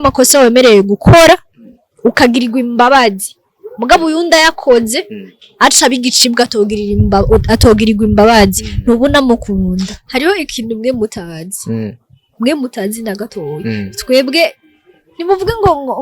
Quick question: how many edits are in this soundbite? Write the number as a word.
one